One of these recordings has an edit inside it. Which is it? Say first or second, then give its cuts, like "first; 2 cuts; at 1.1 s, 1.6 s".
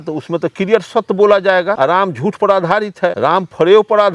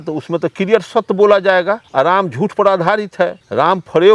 first; 2 cuts; at 1.8 s, 3.1 s